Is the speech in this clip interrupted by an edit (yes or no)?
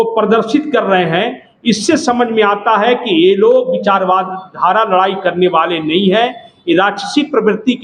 no